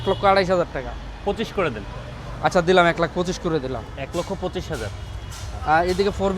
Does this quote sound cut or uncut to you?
uncut